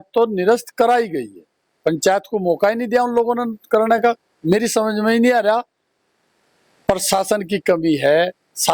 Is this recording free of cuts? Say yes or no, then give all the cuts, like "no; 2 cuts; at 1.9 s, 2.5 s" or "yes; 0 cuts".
yes; 0 cuts